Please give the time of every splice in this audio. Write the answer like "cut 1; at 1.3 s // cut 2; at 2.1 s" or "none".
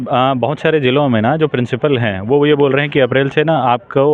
none